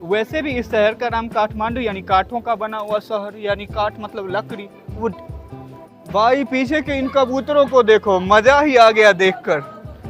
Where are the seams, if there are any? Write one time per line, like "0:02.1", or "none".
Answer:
none